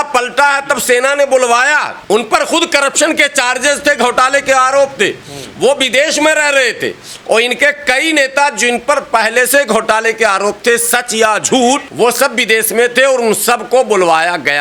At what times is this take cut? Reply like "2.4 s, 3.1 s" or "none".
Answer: none